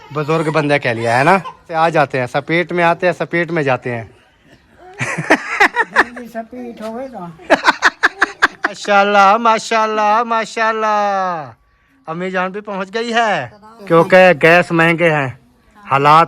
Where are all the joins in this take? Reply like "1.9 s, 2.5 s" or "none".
1.7 s, 8.7 s, 13.7 s